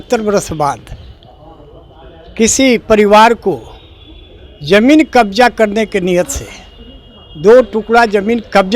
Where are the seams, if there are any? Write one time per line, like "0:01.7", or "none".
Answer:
none